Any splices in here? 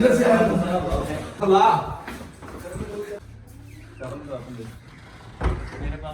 yes; 2 cuts; at 1.4 s, 3.2 s

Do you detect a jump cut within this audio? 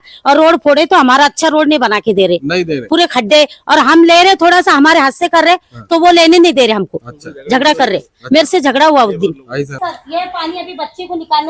yes; 1 cut; at 9.7 s

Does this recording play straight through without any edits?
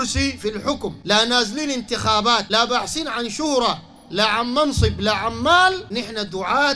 no; 3 cuts; at 1.0 s, 2.5 s, 5.9 s

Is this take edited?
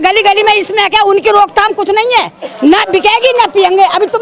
yes; 1 cut; at 2.5 s

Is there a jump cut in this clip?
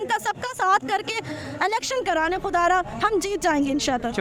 no; 0 cuts

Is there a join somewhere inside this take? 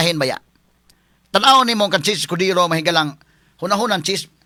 no; 0 cuts

